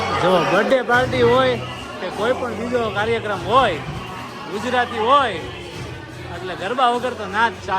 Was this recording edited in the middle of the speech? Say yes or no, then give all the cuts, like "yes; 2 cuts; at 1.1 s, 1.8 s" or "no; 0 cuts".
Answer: no; 0 cuts